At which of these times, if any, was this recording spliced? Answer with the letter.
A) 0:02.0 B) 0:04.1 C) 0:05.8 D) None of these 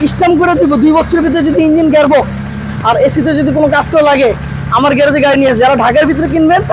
D